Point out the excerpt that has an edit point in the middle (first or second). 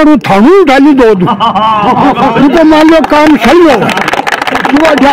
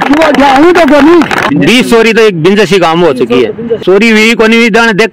second